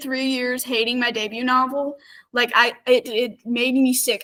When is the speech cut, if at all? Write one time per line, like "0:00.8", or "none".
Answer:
none